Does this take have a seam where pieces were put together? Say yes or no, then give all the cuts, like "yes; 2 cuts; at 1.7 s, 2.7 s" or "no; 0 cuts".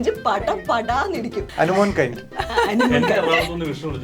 yes; 1 cut; at 1.4 s